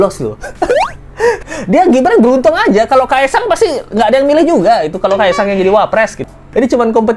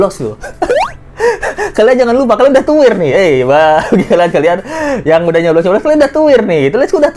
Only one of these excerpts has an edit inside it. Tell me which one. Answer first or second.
first